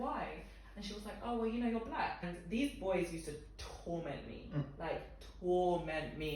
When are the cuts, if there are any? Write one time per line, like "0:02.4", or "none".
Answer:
0:02.3